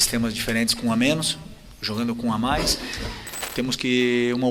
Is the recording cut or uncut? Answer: cut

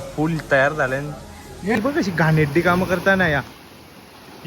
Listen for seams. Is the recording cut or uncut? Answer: cut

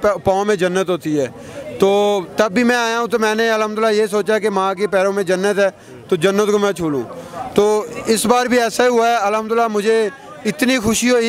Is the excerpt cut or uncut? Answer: uncut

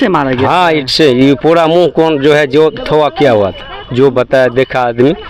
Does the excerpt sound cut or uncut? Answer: uncut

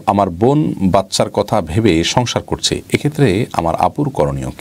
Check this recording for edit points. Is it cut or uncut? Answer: uncut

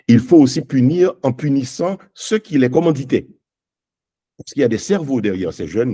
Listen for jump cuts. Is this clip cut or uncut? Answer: uncut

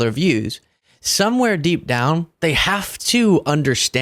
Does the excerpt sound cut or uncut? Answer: cut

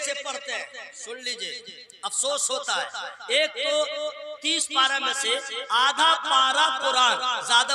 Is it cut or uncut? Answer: uncut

